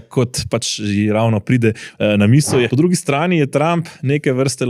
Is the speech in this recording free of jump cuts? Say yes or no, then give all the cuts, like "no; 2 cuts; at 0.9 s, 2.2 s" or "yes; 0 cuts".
no; 1 cut; at 2.7 s